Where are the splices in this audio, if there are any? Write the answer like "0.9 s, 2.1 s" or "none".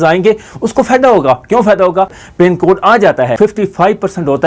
2.2 s, 3.3 s